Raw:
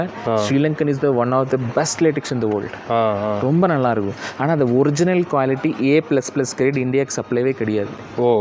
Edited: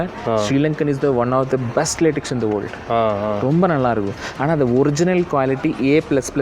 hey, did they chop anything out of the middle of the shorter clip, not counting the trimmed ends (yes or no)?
no